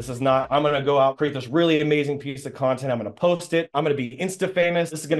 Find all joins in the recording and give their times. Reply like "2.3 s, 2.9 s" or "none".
3.7 s